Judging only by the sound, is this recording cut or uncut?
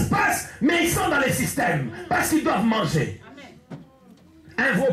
uncut